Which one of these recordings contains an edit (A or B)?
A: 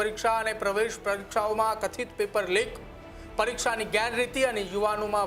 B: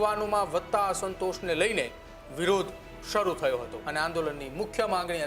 B